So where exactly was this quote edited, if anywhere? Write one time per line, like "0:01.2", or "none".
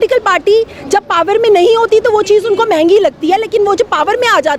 none